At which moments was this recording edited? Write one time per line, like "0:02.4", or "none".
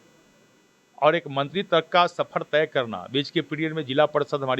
none